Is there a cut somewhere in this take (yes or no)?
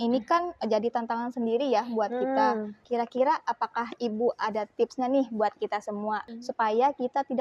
yes